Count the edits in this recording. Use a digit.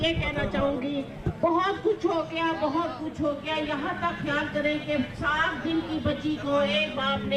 0